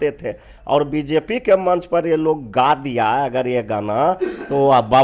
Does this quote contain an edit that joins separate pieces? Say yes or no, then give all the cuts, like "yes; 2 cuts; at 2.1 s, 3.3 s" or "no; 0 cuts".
no; 0 cuts